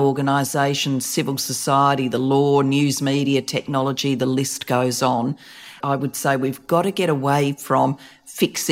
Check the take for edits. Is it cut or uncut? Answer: cut